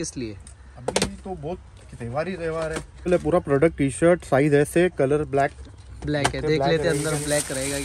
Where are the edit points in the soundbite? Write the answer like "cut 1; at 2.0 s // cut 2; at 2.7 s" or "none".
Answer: cut 1; at 3.1 s